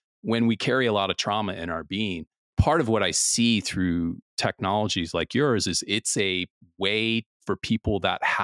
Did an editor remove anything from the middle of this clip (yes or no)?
yes